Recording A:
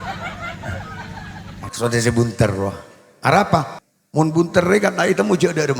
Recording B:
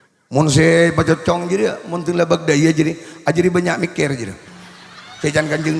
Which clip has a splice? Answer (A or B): A